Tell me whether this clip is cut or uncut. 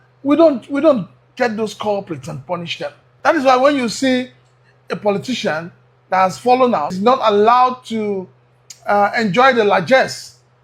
cut